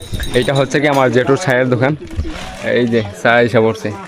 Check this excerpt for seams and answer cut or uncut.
uncut